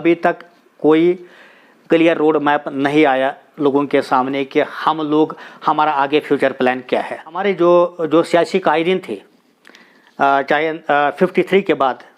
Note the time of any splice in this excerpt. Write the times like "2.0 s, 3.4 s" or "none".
7.4 s